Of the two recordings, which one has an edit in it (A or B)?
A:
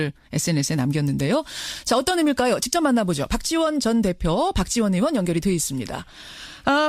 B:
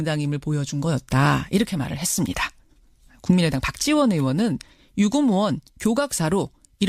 A